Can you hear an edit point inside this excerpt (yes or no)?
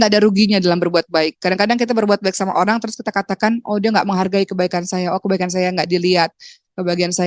no